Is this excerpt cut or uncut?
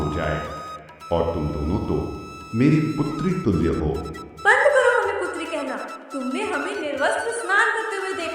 cut